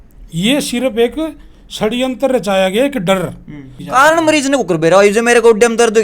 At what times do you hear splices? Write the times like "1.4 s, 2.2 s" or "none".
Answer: 3.8 s